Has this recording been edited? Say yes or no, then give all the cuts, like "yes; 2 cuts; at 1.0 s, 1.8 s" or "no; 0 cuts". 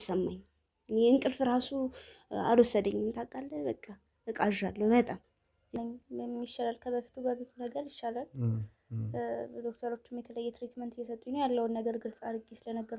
yes; 1 cut; at 5.7 s